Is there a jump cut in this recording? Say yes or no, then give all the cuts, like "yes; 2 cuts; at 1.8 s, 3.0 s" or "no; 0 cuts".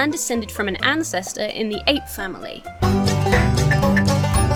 no; 0 cuts